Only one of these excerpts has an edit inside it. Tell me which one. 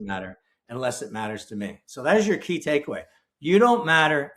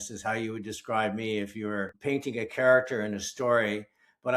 second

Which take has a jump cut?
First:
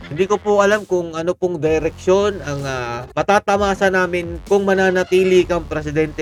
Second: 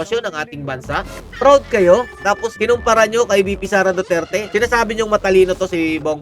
second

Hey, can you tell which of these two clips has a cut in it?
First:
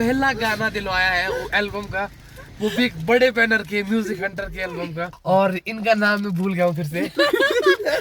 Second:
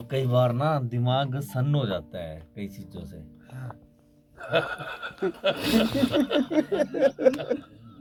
first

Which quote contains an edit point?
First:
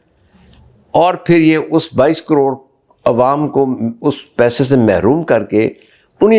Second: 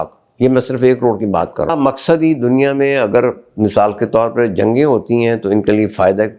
second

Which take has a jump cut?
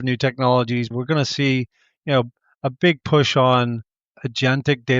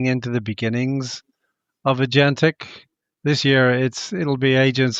first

